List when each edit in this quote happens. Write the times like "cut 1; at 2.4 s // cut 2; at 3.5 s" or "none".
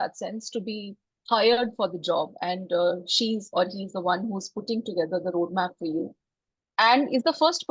none